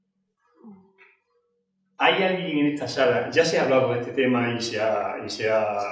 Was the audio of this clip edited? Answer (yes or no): no